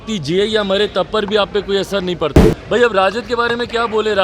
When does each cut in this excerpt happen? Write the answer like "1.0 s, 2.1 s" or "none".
2.5 s